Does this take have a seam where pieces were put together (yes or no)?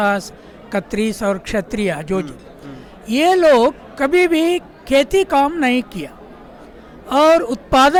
no